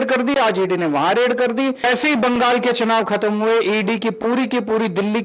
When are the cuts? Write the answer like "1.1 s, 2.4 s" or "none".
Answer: 1.8 s